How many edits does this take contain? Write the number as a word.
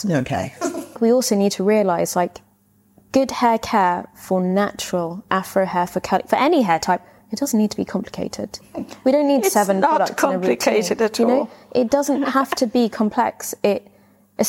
one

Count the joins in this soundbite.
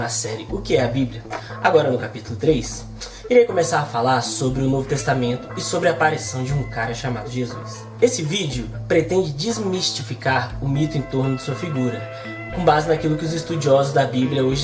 zero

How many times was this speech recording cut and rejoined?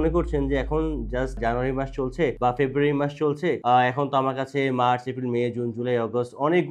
three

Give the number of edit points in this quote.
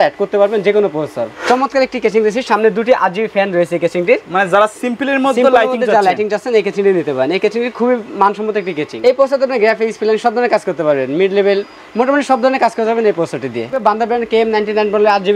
three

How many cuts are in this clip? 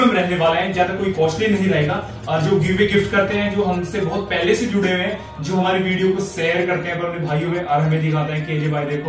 zero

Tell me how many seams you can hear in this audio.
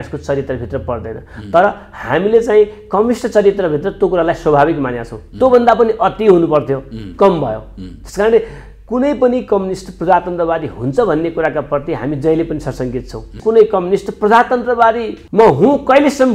two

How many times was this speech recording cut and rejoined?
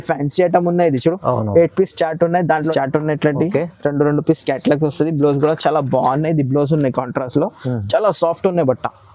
one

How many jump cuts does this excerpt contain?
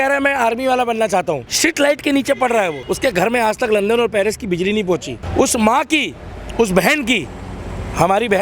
three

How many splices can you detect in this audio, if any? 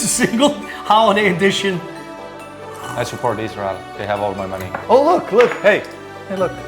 one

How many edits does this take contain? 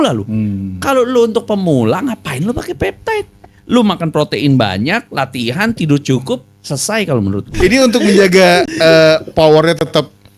one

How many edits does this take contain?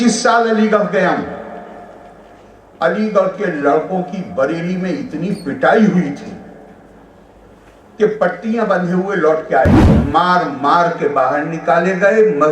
one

